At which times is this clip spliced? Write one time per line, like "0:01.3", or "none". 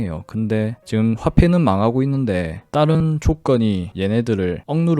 none